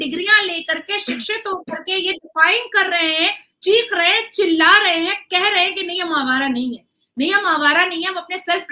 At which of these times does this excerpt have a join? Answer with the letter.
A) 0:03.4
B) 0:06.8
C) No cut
C